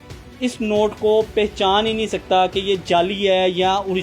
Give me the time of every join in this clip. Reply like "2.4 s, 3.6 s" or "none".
none